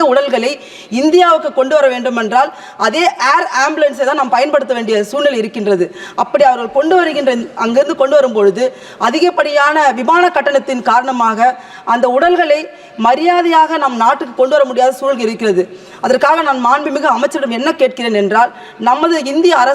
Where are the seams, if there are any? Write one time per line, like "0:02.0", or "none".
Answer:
none